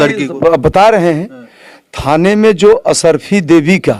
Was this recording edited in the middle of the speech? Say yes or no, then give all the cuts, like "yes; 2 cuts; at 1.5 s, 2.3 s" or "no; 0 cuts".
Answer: no; 0 cuts